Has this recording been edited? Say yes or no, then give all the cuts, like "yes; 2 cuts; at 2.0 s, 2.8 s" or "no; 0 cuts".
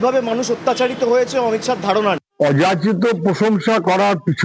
yes; 1 cut; at 2.2 s